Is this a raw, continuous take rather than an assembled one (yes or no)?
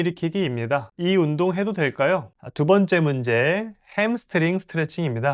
no